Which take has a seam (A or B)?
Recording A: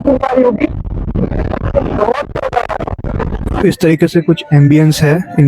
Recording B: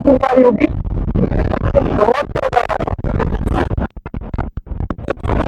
A